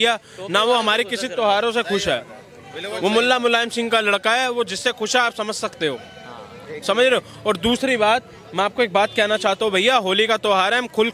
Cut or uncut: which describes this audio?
uncut